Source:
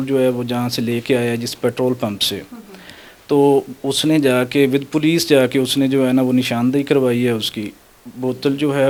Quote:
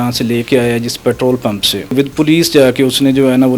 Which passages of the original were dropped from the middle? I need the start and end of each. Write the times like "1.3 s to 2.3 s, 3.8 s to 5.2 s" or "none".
2.5 s to 4.7 s